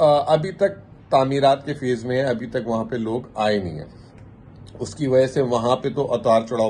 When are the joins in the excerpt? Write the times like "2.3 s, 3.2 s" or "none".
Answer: none